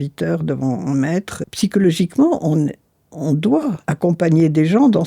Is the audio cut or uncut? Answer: cut